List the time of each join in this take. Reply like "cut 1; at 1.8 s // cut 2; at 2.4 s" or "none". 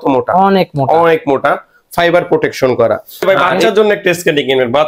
cut 1; at 3.2 s